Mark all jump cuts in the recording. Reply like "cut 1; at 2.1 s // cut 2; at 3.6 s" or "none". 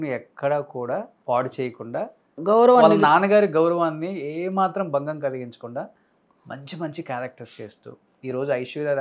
cut 1; at 1.1 s // cut 2; at 2.4 s